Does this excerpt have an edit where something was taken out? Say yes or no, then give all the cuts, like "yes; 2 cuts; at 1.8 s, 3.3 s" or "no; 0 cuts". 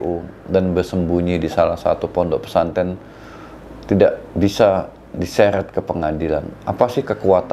no; 0 cuts